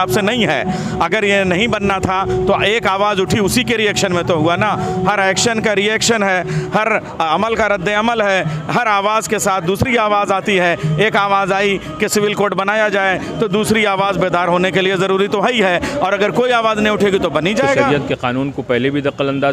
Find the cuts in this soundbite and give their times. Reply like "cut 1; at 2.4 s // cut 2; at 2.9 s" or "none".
cut 1; at 17.8 s